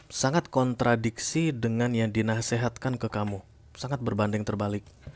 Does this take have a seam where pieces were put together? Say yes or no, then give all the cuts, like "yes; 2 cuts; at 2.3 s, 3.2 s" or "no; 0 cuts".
no; 0 cuts